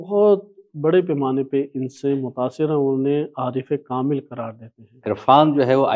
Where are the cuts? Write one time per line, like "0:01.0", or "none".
0:05.0